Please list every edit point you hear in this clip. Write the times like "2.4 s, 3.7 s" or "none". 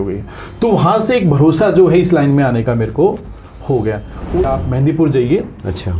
4.5 s